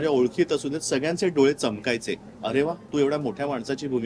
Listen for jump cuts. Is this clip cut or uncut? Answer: uncut